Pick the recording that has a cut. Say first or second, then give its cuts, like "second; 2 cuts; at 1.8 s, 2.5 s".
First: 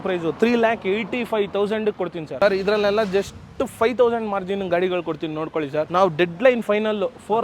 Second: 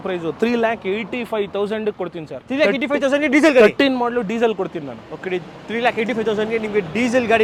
first; 2 cuts; at 2.2 s, 5.9 s